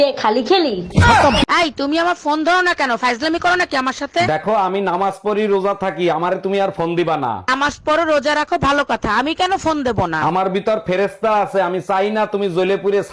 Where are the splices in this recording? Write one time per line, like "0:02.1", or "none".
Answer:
0:01.4